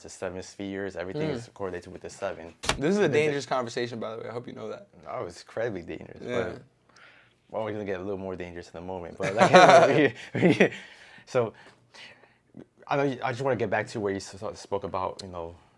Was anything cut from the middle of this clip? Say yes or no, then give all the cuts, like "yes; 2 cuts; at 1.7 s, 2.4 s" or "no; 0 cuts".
yes; 1 cut; at 2.5 s